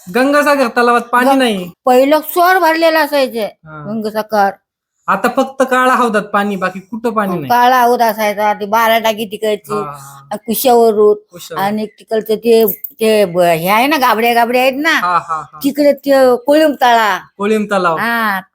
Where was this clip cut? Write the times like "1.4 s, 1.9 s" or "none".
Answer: 1.7 s